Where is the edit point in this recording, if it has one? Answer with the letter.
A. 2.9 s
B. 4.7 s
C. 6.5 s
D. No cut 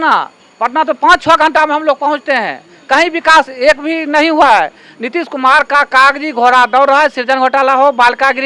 D